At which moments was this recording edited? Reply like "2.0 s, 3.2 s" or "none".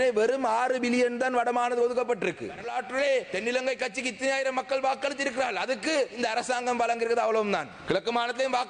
2.6 s, 3.3 s, 6.2 s, 7.7 s